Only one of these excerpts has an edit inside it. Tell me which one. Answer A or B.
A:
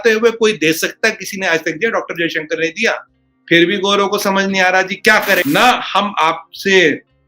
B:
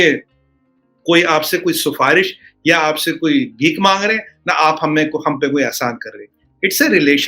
A